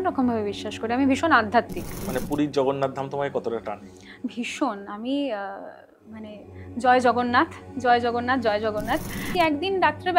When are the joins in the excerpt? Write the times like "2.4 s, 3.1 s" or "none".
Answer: 2.1 s, 9.3 s